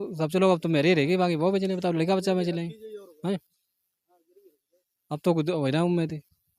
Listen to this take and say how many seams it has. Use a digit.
0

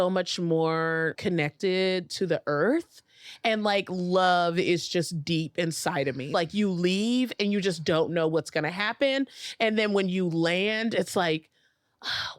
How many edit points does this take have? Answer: 2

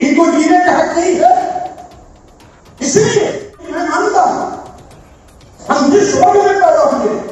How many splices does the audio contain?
1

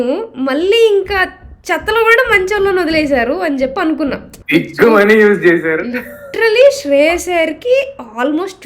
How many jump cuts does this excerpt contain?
1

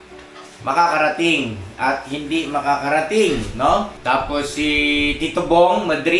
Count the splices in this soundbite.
1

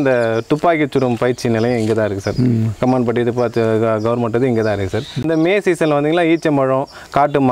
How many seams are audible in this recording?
1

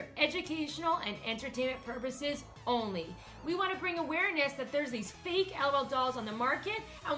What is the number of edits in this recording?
1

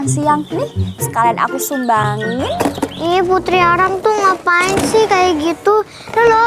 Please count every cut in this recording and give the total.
1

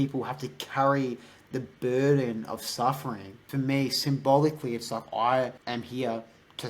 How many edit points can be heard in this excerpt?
2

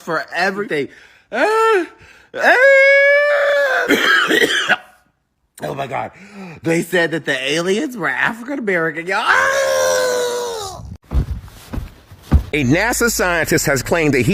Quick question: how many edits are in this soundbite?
1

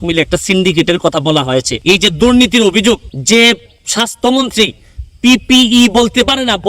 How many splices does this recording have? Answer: 2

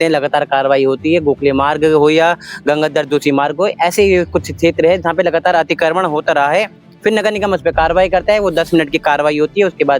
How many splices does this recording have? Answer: 0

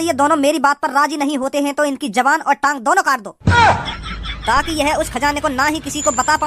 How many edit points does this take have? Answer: 1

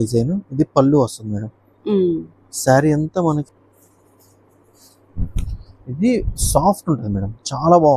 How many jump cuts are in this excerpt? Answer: 1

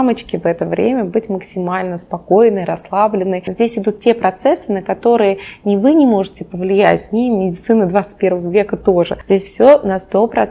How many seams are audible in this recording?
2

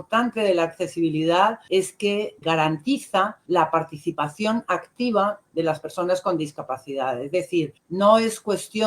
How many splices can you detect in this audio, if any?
3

